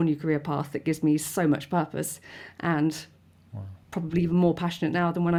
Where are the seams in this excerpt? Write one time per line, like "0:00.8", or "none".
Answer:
none